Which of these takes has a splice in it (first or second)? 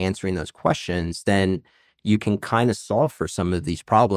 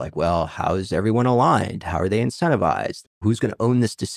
second